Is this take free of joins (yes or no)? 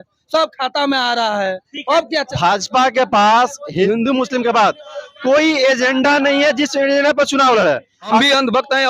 no